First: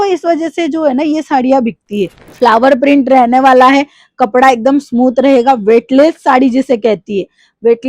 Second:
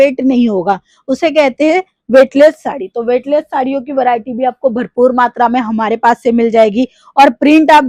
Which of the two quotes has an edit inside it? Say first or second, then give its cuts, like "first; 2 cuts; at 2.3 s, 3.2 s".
first; 1 cut; at 2.2 s